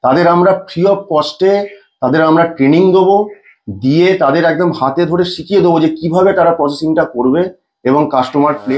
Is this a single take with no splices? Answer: yes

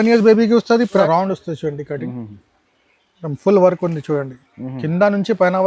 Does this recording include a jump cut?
yes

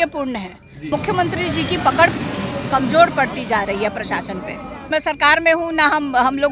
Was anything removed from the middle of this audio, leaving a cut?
yes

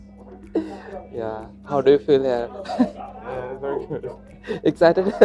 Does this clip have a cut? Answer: no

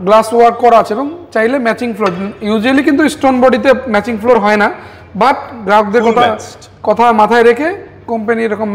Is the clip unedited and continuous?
yes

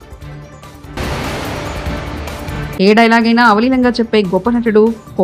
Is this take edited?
no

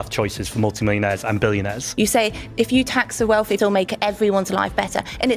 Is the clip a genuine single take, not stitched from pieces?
no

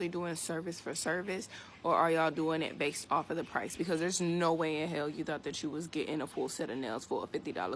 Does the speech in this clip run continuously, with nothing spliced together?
yes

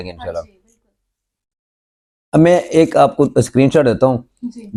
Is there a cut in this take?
no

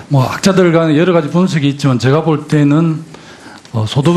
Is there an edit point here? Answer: yes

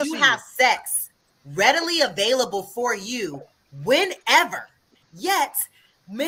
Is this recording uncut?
yes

